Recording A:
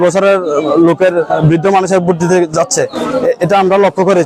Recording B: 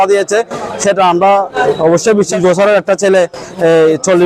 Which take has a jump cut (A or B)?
B